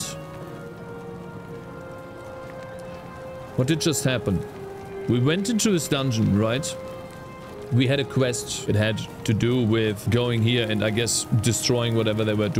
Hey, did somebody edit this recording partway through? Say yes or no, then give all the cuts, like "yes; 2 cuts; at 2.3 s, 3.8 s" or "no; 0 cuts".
no; 0 cuts